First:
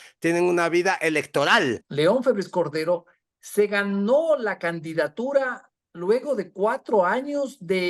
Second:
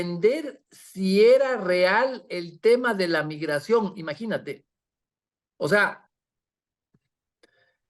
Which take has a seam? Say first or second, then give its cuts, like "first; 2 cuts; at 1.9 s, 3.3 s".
first; 1 cut; at 1.8 s